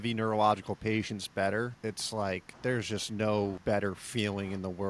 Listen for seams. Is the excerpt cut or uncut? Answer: cut